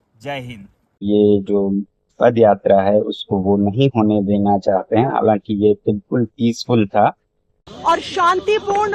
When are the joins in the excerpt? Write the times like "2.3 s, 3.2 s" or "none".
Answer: 1.0 s, 7.7 s